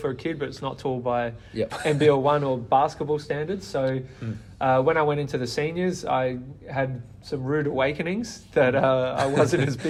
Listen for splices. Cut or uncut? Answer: uncut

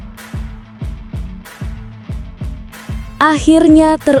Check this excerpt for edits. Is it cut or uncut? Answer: uncut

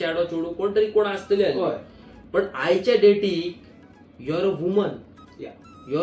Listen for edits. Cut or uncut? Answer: uncut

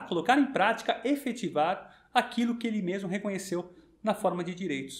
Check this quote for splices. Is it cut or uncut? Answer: uncut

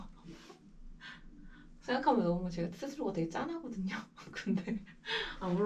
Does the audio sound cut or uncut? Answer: uncut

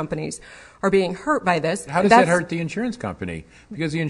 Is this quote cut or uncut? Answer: cut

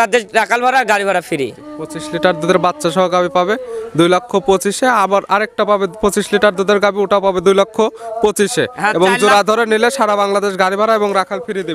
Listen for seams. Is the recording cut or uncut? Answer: uncut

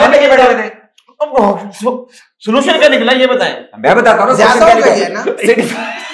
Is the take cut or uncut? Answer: uncut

